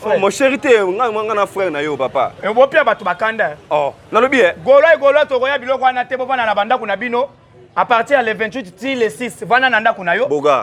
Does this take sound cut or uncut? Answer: uncut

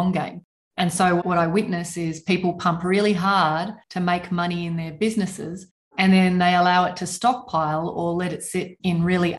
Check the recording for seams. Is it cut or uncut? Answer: uncut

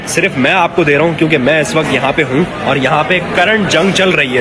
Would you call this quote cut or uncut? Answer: uncut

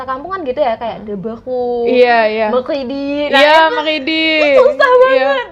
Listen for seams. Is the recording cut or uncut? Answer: uncut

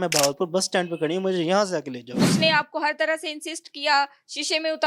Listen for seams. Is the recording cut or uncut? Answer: cut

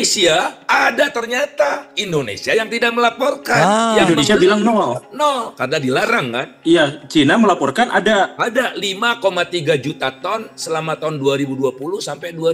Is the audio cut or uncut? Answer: uncut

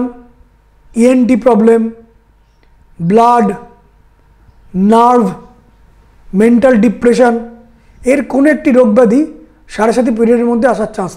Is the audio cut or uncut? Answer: uncut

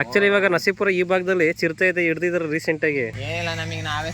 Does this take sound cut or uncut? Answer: cut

